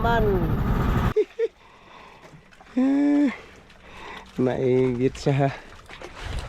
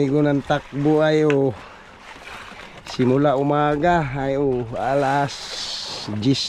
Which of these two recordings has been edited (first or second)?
first